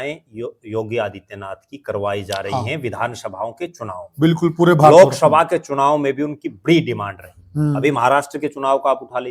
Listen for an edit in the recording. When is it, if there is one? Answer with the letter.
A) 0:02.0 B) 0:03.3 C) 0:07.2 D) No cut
D